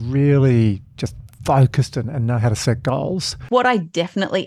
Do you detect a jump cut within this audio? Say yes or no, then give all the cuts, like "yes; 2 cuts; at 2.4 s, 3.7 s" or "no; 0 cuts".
yes; 1 cut; at 3.4 s